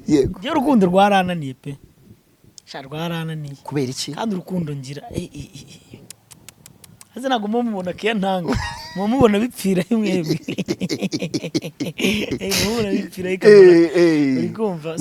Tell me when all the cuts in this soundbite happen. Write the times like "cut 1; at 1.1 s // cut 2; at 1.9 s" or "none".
none